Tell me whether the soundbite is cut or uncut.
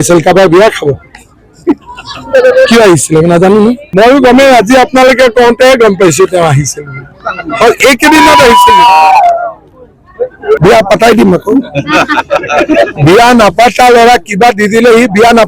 cut